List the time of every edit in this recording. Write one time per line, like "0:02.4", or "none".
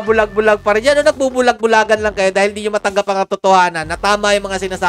none